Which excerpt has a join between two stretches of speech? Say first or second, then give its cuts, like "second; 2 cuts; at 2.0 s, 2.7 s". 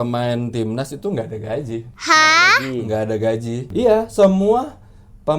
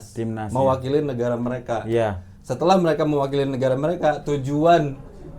first; 1 cut; at 3.7 s